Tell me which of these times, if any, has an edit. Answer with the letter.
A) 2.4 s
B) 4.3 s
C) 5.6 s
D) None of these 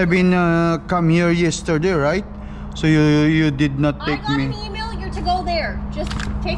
D